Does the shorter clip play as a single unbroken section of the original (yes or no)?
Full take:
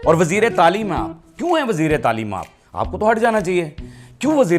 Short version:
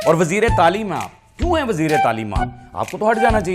yes